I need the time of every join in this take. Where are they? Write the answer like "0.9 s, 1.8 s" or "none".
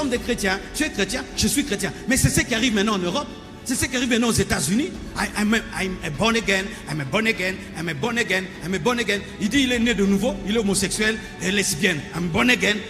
none